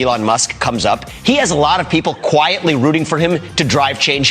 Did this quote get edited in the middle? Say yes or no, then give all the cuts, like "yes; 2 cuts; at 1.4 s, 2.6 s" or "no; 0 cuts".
yes; 1 cut; at 1.1 s